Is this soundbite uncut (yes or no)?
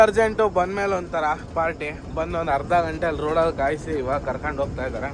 yes